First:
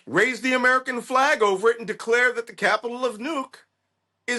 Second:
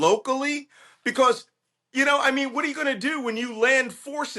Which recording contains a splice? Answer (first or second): second